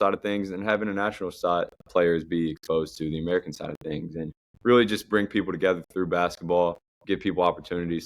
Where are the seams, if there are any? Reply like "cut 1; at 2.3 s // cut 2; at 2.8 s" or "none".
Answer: cut 1; at 1.8 s // cut 2; at 4.4 s // cut 3; at 6.9 s